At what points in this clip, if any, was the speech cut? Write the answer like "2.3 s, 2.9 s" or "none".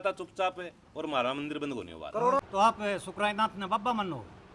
2.4 s